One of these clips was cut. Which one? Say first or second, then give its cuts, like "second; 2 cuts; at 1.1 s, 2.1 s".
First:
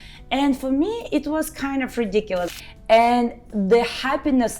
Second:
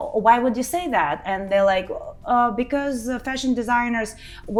first; 1 cut; at 2.5 s